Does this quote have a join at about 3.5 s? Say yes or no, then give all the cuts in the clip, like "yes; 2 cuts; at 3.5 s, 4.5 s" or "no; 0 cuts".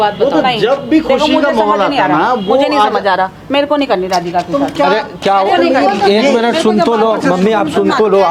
no; 0 cuts